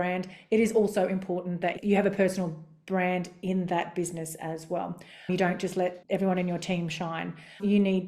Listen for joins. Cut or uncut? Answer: cut